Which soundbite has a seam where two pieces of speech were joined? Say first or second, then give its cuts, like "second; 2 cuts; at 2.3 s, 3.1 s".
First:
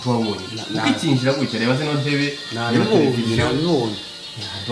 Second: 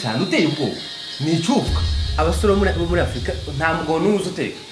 second; 1 cut; at 2.0 s